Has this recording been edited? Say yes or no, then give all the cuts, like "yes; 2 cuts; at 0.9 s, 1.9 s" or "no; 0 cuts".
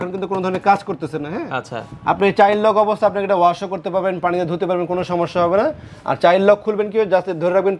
no; 0 cuts